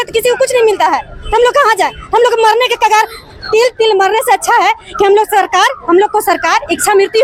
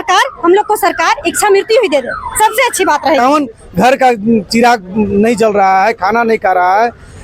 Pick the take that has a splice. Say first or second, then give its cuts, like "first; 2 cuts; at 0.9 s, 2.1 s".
second; 1 cut; at 3.2 s